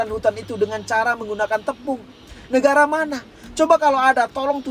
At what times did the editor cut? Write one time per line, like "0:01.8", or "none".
none